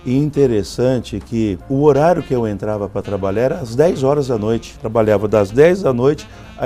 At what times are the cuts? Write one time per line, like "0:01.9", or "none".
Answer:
0:01.6
0:04.7